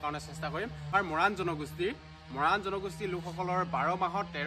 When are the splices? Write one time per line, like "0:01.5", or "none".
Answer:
0:00.9